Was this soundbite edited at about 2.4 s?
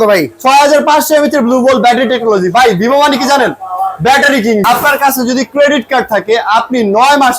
no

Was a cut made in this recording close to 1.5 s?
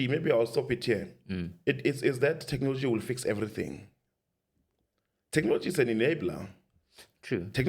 no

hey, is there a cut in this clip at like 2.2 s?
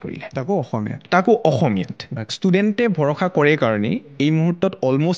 yes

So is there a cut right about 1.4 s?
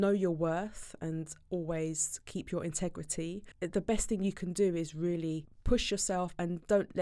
no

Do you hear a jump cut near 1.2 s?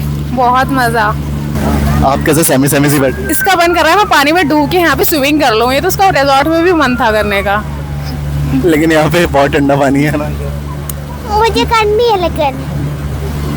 no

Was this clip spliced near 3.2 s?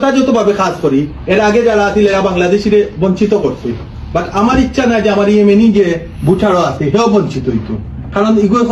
no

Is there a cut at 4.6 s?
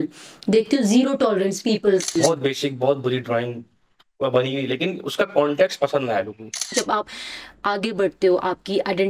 no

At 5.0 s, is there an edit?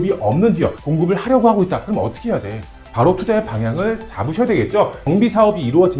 yes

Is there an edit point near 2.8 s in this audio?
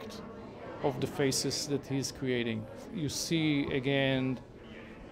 yes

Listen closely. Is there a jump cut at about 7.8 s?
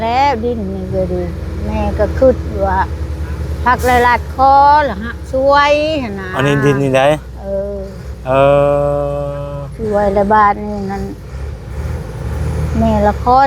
no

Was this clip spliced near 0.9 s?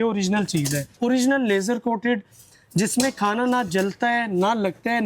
yes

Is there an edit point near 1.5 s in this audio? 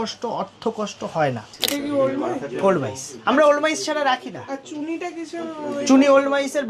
yes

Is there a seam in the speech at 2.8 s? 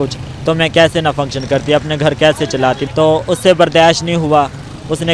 yes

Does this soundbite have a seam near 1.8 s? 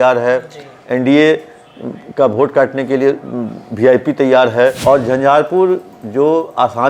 no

